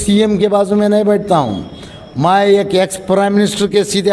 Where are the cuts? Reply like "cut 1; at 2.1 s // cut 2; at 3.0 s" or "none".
none